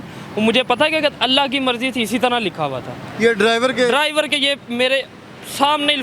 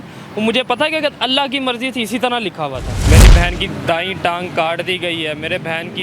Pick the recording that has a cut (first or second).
second